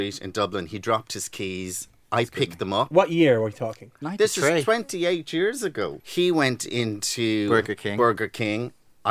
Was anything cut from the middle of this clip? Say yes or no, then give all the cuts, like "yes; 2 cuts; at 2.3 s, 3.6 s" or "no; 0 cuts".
yes; 1 cut; at 6.0 s